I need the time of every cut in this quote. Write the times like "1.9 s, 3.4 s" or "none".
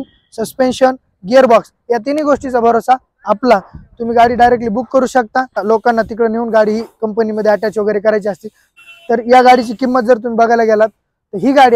5.6 s, 8.6 s